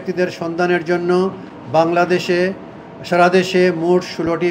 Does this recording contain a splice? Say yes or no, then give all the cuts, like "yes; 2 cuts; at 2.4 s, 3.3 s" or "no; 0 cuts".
no; 0 cuts